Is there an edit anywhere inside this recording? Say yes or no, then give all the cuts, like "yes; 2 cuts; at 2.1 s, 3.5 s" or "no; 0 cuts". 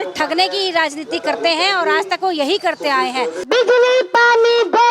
yes; 1 cut; at 3.4 s